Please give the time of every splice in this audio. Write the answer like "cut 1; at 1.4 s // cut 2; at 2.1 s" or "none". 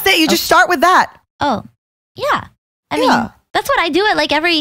cut 1; at 1.2 s // cut 2; at 3.4 s